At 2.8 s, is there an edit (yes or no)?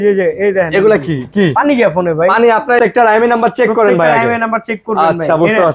yes